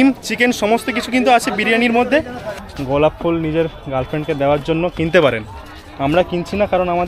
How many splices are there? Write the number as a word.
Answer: one